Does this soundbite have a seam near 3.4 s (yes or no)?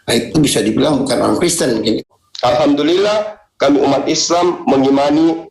no